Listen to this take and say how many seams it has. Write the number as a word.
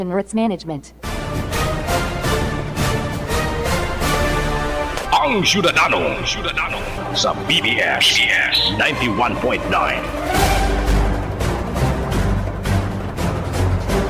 one